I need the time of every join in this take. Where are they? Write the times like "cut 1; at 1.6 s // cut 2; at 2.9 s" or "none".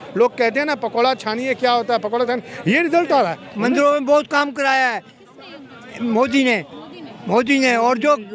cut 1; at 3.4 s